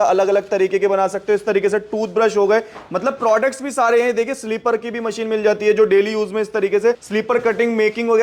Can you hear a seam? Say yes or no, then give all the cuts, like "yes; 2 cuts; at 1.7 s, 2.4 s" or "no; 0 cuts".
yes; 1 cut; at 7.0 s